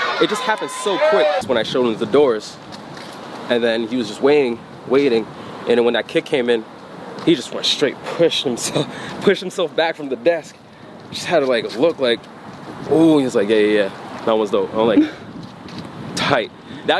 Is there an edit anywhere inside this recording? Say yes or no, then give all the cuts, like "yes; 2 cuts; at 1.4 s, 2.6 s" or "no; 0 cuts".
yes; 1 cut; at 1.4 s